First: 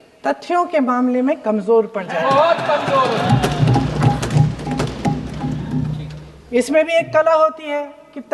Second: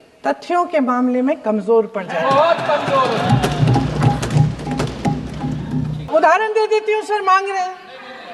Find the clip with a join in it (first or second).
second